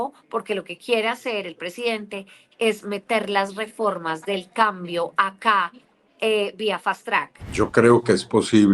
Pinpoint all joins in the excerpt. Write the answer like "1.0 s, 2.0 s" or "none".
7.4 s